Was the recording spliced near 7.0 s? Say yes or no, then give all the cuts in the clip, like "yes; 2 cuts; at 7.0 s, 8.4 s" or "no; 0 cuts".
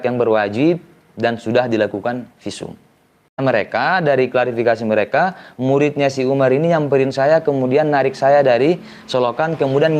no; 1 cut; at 3.4 s